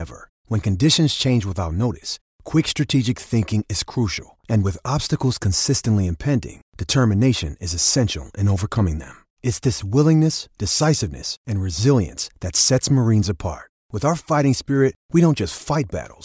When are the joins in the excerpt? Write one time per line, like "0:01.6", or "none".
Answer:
none